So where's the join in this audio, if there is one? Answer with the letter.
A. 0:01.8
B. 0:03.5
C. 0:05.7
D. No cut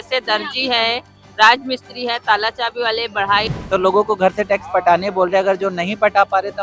B